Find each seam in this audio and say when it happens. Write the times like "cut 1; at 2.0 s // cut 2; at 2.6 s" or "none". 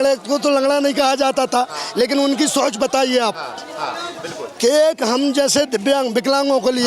none